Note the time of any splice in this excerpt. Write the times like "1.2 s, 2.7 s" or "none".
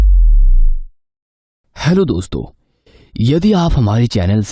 1.6 s